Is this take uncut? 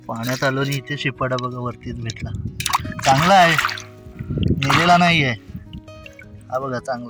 yes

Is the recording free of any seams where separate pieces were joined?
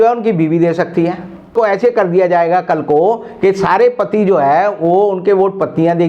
no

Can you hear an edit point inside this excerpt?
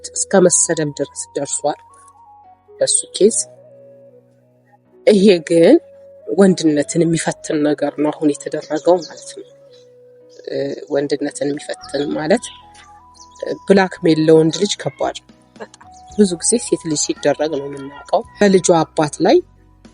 yes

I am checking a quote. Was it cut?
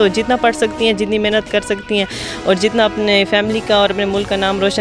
no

